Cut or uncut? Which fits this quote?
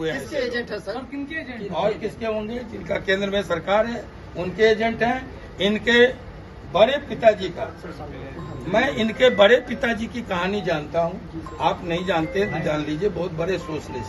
uncut